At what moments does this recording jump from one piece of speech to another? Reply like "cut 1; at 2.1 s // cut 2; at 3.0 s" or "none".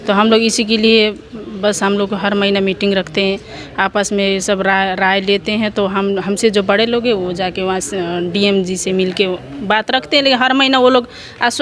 none